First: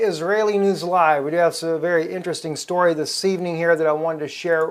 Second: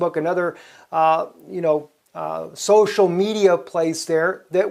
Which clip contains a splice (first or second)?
first